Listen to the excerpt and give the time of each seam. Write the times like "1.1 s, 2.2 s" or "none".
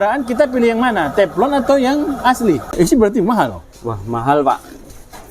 2.7 s